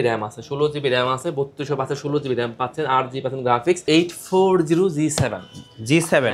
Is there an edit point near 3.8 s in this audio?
yes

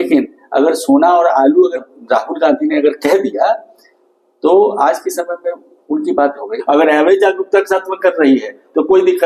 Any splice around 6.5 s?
yes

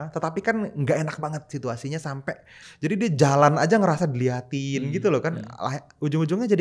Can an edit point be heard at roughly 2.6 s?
yes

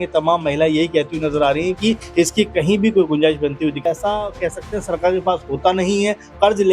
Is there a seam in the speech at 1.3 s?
no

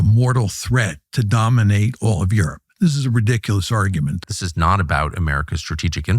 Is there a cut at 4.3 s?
yes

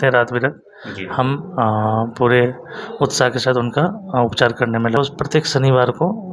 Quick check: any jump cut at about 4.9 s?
yes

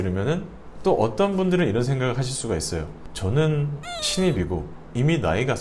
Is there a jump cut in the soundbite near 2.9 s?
yes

